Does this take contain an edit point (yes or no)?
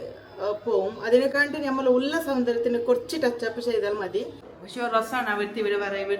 yes